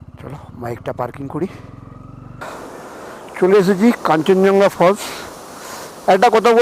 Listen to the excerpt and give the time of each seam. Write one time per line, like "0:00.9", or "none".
0:02.4